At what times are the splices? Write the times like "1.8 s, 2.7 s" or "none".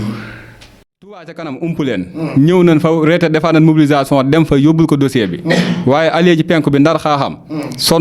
1.1 s